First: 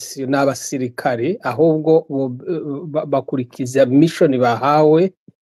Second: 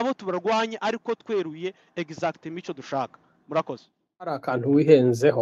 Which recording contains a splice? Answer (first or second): second